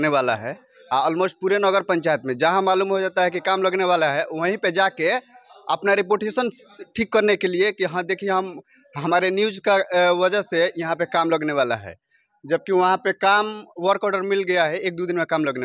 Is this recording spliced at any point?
no; 0 cuts

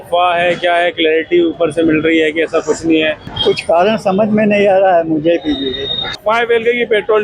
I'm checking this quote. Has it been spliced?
yes; 2 cuts; at 3.3 s, 6.2 s

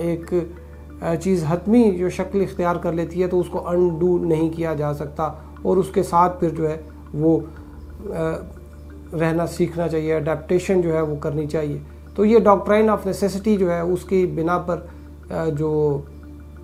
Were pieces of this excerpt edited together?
no; 0 cuts

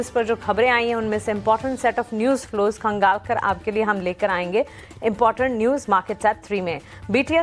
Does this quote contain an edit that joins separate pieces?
no; 0 cuts

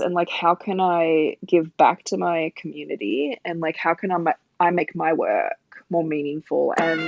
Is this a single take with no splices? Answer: yes; 0 cuts

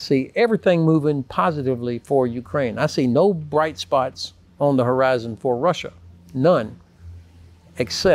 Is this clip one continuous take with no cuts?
yes; 0 cuts

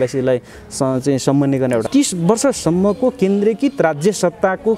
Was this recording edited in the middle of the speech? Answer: yes; 1 cut; at 1.9 s

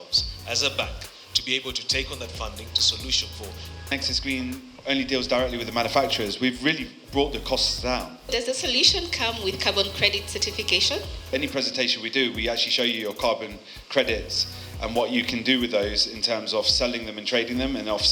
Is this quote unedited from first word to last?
no; 3 cuts; at 3.9 s, 8.1 s, 11.3 s

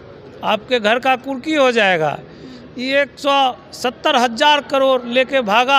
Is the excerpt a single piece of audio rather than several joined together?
yes; 0 cuts

